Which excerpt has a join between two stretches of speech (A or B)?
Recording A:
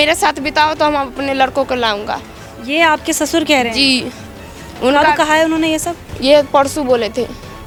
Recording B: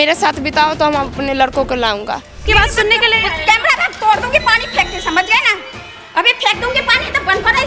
B